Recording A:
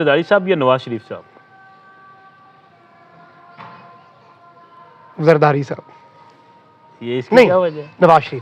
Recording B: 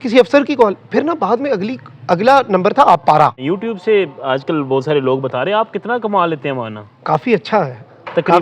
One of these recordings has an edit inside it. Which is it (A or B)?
B